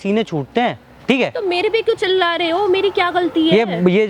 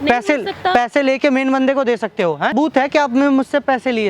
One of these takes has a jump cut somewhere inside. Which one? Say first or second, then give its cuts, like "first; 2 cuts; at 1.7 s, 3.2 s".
second; 1 cut; at 2.5 s